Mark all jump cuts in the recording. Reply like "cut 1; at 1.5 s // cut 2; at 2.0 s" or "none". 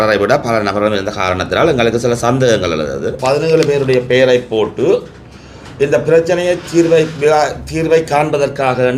cut 1; at 3.2 s